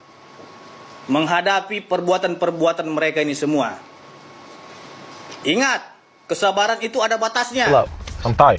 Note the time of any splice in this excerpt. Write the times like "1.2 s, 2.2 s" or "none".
7.7 s